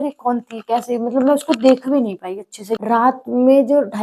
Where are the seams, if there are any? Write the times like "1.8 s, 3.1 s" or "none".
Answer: 3.0 s